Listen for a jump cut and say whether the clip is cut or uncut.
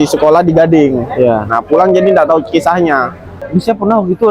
cut